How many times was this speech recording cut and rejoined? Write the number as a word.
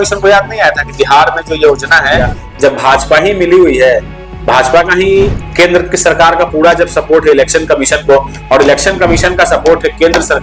one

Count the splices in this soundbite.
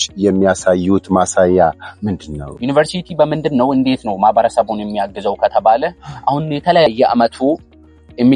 two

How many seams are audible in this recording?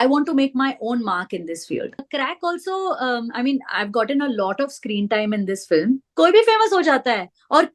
two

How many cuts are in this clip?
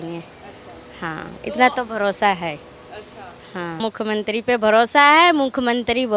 one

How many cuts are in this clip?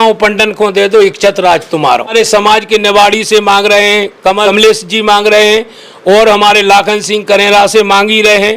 two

